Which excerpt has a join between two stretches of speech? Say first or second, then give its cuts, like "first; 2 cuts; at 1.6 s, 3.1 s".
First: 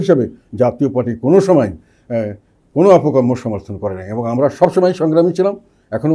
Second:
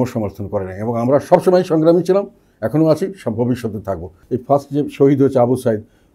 second; 1 cut; at 4.2 s